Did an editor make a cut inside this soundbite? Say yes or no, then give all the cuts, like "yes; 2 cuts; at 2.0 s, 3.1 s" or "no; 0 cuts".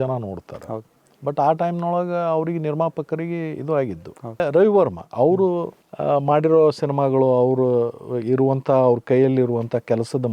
yes; 1 cut; at 4.4 s